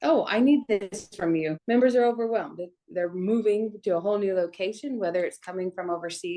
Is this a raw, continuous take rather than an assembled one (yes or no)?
no